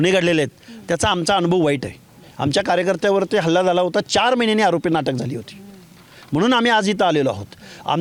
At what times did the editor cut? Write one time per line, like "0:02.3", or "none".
none